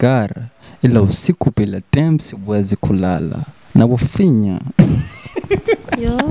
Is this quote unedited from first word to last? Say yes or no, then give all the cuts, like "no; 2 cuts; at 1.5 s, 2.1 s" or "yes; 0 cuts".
yes; 0 cuts